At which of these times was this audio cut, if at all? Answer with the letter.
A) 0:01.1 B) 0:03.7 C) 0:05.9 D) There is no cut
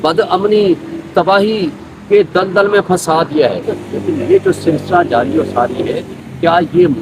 B